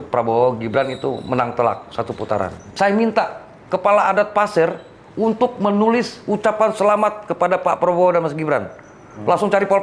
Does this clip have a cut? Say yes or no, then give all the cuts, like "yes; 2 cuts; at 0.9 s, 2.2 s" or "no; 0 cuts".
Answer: yes; 1 cut; at 2.7 s